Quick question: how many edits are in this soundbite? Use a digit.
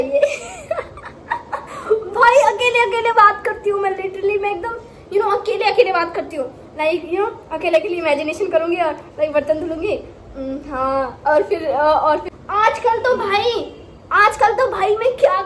1